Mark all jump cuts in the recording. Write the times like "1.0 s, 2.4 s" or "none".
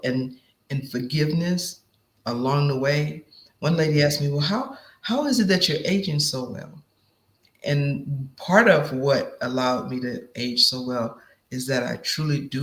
none